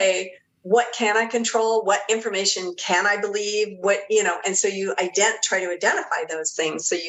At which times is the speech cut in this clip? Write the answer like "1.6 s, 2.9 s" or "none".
none